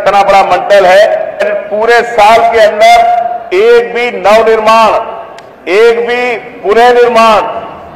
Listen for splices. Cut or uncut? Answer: cut